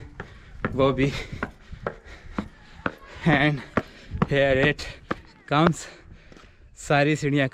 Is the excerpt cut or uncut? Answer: uncut